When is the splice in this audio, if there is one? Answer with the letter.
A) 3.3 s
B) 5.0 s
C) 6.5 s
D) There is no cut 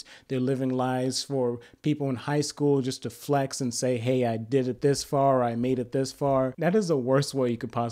C